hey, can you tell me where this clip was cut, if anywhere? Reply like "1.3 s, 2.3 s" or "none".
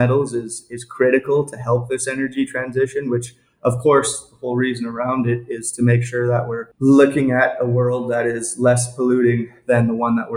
6.6 s